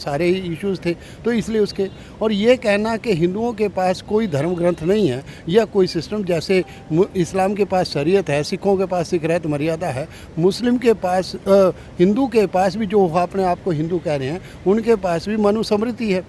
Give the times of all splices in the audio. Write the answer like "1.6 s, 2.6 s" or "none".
none